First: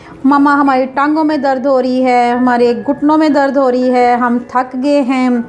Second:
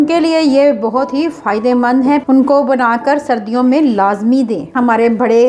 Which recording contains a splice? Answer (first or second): second